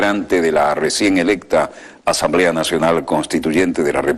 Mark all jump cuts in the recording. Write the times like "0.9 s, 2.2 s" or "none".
none